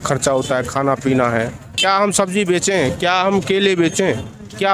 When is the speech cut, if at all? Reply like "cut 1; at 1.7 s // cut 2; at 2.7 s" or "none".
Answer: cut 1; at 1.8 s